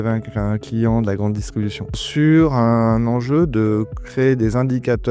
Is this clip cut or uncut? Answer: cut